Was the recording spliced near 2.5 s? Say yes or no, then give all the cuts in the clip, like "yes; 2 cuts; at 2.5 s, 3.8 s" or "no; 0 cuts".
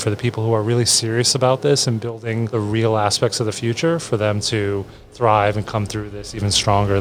yes; 1 cut; at 2.5 s